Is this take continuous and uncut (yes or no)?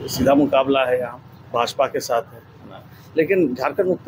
yes